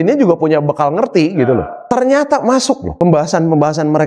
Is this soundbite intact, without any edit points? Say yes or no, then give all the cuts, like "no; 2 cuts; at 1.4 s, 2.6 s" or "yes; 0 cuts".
no; 2 cuts; at 1.7 s, 2.9 s